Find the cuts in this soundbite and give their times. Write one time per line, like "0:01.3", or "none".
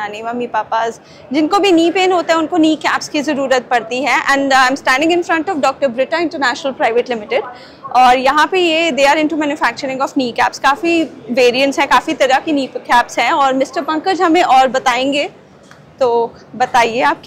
none